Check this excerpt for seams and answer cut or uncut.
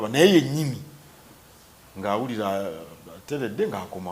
uncut